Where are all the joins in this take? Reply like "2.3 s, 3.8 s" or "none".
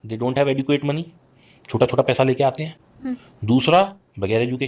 none